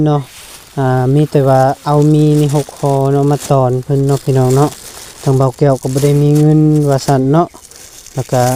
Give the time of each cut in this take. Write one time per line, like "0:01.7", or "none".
none